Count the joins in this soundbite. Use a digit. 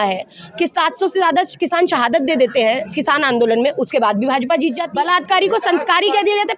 1